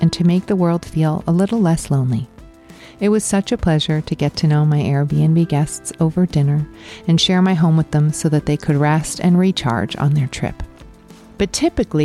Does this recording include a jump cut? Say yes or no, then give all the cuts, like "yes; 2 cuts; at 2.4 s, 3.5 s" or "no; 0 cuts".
no; 0 cuts